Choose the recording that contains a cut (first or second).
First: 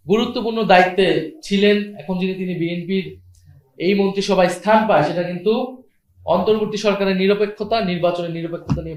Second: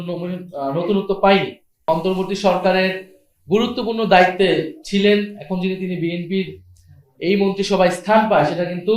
second